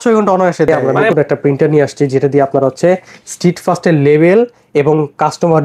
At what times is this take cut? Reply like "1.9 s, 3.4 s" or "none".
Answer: 1.0 s